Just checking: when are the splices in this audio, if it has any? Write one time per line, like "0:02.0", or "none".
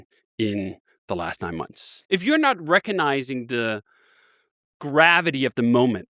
0:01.9